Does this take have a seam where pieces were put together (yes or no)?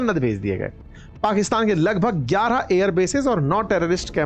no